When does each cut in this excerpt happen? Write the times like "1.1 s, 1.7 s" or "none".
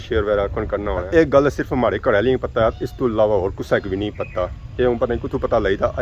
1.0 s